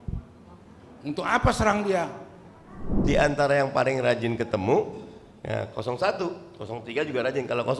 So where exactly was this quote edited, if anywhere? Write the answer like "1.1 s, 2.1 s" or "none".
3.0 s